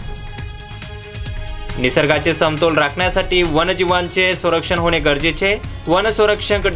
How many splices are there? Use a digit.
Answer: 1